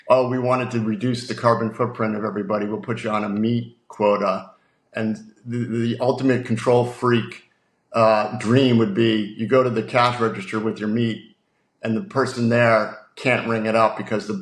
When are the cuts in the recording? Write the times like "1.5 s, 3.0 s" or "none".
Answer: none